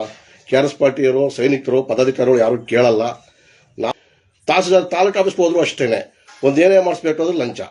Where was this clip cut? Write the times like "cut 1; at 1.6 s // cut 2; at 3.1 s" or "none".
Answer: cut 1; at 3.9 s